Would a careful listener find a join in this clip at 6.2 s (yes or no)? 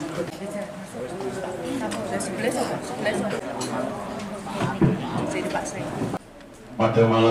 yes